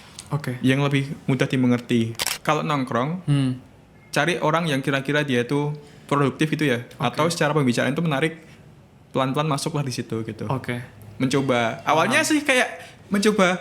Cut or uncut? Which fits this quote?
cut